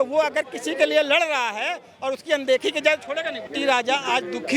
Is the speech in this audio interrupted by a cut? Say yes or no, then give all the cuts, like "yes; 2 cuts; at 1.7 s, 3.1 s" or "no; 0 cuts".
yes; 1 cut; at 3.5 s